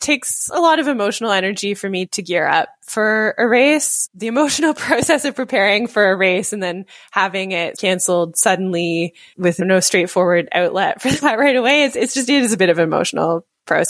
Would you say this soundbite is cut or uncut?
cut